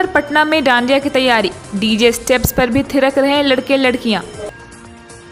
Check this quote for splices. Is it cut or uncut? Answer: uncut